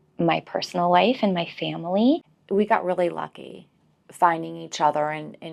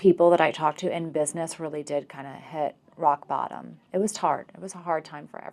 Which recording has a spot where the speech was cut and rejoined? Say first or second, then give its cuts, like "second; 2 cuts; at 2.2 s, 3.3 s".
first; 1 cut; at 2.3 s